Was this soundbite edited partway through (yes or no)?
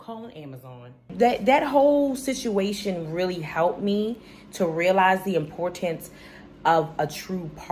yes